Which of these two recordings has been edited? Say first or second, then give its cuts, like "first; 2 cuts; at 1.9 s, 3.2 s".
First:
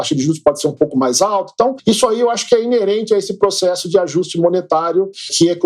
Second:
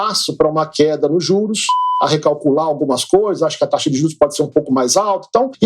second; 1 cut; at 1.9 s